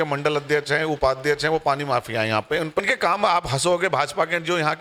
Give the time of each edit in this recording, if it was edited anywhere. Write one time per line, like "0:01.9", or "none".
0:02.8